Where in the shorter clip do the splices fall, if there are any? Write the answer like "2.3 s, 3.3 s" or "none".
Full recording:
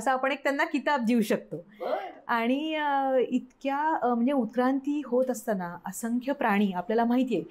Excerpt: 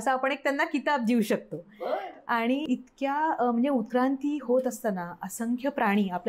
2.7 s

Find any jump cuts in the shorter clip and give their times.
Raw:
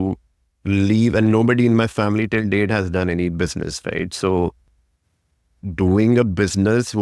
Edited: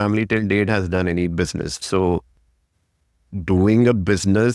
1.8 s

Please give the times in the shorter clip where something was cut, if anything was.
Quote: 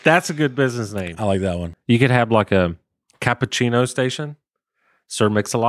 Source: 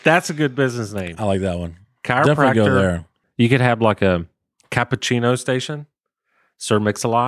1.7 s

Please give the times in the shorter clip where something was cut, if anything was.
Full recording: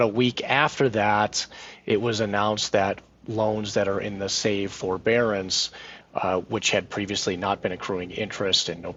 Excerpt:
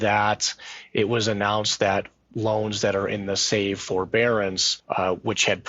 4.7 s

